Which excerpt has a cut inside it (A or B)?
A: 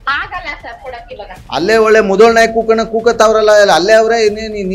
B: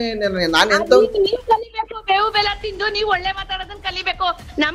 A